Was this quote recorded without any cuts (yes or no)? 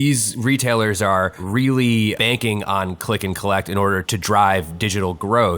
no